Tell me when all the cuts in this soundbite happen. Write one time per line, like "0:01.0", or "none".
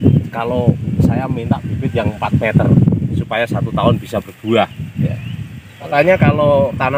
0:05.9